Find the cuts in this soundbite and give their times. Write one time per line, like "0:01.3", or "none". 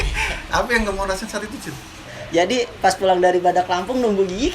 0:02.1